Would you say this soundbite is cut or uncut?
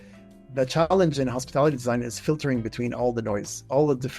uncut